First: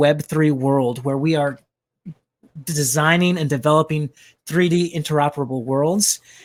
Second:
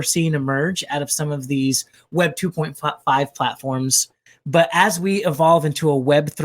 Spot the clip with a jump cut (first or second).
second